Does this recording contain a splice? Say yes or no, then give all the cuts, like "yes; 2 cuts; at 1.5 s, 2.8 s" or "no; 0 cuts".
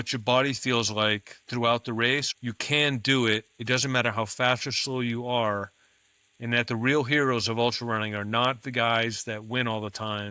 yes; 1 cut; at 2.3 s